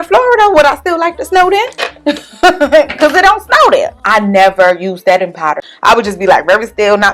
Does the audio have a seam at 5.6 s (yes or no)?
yes